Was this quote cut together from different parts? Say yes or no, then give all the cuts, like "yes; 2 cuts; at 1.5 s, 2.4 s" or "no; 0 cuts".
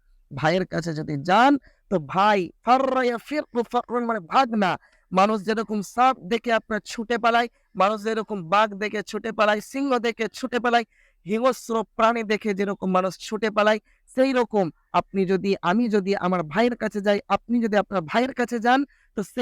no; 0 cuts